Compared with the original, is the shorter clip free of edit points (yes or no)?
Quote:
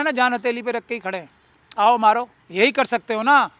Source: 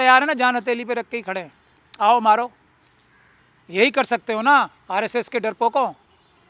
no